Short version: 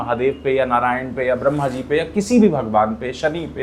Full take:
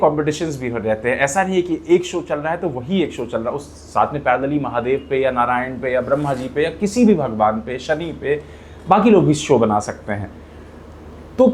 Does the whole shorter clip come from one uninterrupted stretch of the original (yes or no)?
yes